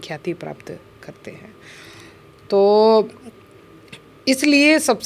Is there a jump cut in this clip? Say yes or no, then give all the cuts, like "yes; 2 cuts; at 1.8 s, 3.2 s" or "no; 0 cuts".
no; 0 cuts